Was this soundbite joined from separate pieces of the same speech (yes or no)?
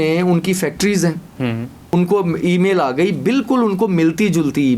yes